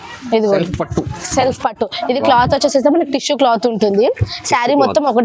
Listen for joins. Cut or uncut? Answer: uncut